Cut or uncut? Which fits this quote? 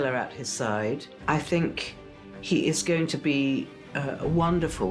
cut